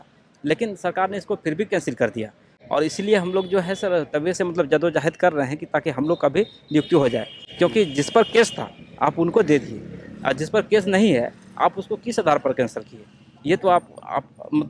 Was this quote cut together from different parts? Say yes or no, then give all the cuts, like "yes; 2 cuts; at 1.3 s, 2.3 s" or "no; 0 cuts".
no; 0 cuts